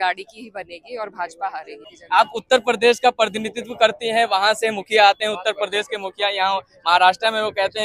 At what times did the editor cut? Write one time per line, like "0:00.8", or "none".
0:01.8

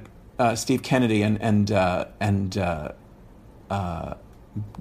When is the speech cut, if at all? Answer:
none

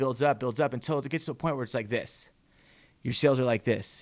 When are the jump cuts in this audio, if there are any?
none

